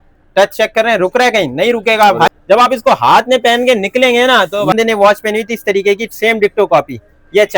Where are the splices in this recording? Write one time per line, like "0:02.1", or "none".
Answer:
0:02.3
0:04.7